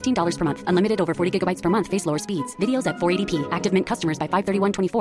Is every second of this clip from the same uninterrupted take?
yes; 0 cuts

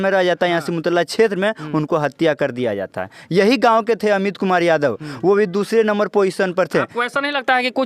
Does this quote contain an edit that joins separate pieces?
no; 0 cuts

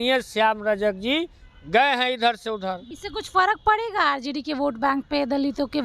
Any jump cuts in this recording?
yes; 1 cut; at 2.9 s

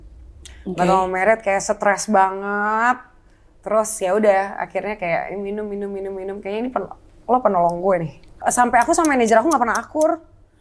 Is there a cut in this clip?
yes; 1 cut; at 8.3 s

